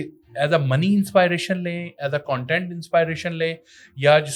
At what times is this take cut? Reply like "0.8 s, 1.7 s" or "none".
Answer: none

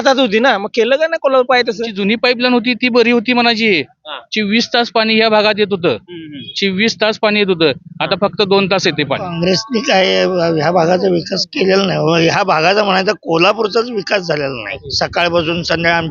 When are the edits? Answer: 1.9 s, 9.3 s, 14.7 s

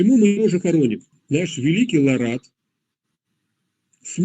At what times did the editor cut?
1.1 s

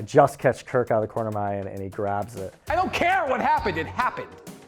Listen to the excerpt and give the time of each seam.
2.6 s

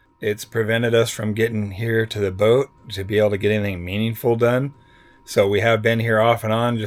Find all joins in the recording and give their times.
none

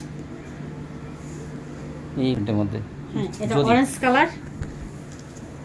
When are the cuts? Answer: 2.4 s

